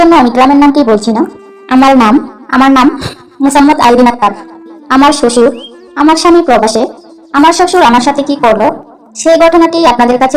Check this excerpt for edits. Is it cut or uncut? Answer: cut